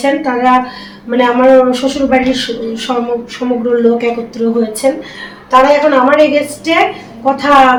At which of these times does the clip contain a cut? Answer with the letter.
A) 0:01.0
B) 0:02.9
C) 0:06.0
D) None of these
D